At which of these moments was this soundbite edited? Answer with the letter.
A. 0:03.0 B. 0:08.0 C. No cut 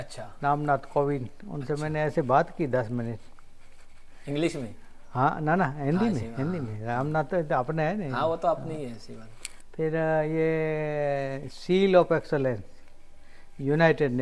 C